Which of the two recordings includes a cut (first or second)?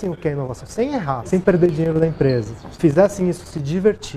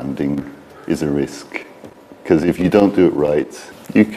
first